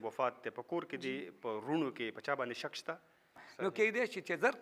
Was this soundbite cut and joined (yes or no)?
yes